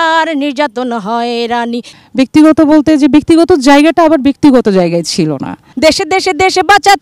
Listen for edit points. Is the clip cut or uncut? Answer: cut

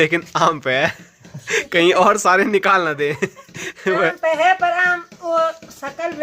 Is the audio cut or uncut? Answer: uncut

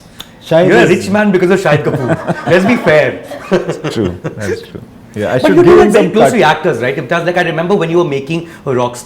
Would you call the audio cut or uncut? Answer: uncut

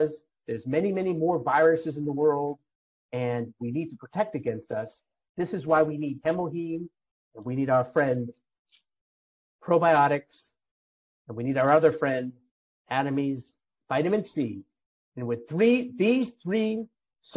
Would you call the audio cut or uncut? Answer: uncut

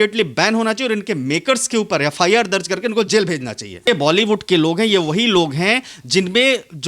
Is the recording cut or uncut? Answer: cut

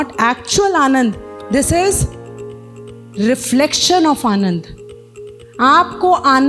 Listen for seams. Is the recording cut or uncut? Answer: uncut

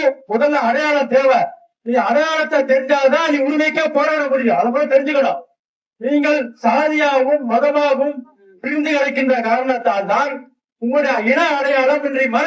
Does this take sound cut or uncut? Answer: uncut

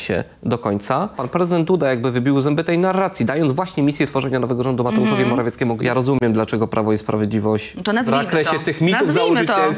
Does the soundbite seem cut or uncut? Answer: cut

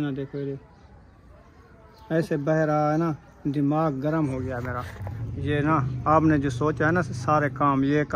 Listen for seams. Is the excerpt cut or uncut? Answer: uncut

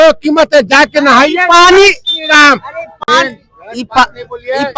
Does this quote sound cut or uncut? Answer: uncut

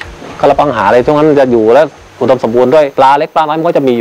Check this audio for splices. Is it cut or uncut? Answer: cut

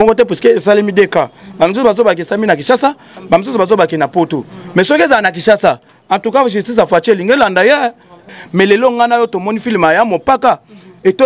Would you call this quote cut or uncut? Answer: cut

